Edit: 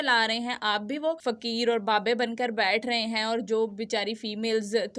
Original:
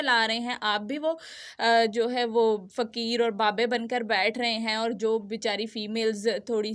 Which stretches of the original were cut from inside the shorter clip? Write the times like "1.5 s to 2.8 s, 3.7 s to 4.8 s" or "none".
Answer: 1.3 s to 2.8 s

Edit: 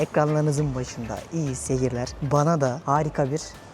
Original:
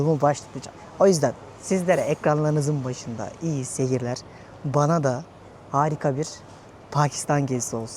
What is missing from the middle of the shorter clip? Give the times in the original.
4.2 s to 4.6 s, 5.2 s to 5.7 s

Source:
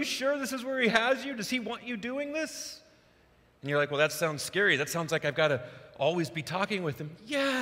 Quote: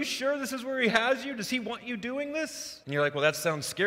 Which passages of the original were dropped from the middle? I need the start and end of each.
2.7 s to 3.5 s

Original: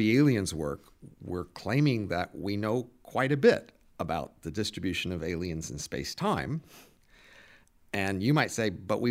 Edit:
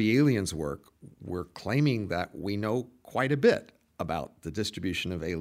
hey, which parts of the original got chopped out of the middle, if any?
none

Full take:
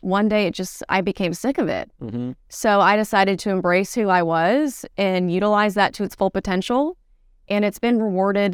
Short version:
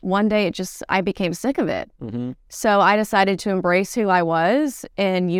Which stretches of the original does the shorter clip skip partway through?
none

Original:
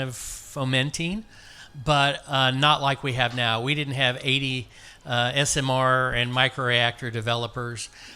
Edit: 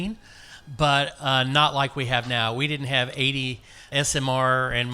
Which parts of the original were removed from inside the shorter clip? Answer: 5.0 s to 5.3 s

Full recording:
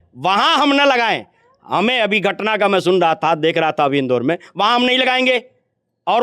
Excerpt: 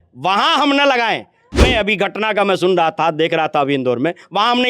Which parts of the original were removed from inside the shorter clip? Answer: 1.6 s to 1.9 s

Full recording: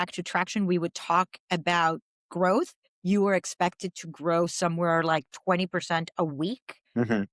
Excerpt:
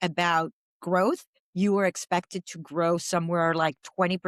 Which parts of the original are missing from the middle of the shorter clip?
none

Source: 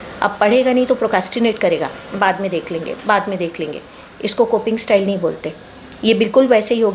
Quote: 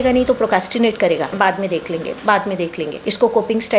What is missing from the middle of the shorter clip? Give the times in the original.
1.9 s to 2.1 s, 3.8 s to 4.1 s

